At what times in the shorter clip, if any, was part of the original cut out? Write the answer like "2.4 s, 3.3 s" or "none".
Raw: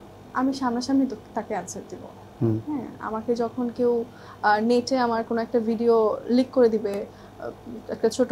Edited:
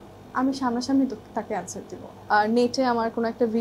2.1 s